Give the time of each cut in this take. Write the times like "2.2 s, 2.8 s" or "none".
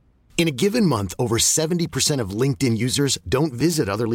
none